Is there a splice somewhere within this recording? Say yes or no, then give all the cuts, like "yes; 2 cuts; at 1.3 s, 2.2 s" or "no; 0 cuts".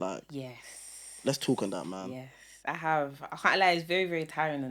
no; 0 cuts